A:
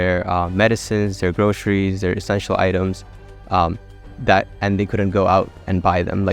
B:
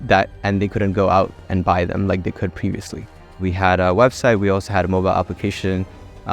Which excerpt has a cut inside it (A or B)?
B